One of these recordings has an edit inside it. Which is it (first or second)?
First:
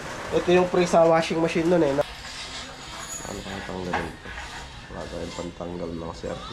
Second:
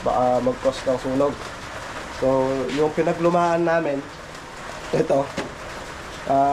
first